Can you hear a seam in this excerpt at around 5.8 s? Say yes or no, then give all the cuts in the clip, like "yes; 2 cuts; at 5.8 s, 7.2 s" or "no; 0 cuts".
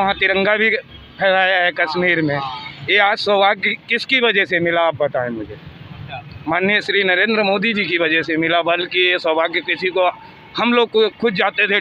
no; 0 cuts